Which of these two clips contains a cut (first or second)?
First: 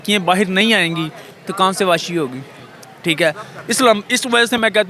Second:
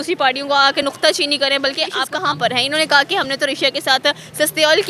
second